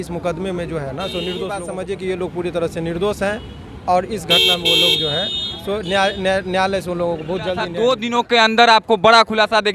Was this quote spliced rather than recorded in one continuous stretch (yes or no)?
yes